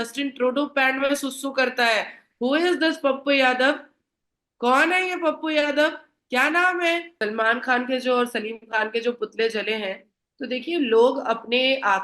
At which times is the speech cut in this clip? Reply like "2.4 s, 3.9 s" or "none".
7.1 s